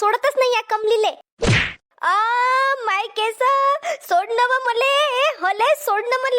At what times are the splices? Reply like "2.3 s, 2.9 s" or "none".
1.4 s